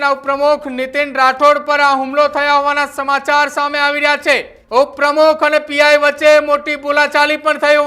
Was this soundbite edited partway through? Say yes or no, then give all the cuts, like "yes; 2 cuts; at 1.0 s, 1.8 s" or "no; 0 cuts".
yes; 1 cut; at 4.5 s